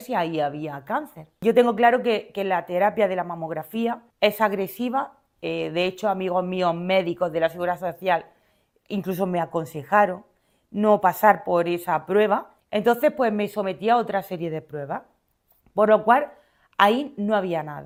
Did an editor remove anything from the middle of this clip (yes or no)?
no